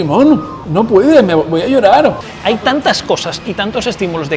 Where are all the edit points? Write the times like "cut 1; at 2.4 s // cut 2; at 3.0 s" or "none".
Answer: cut 1; at 2.2 s